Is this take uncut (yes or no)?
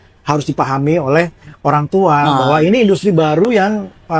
yes